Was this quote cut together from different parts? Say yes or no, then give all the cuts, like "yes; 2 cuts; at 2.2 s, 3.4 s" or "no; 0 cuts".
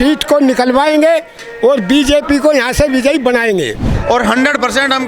yes; 1 cut; at 3.9 s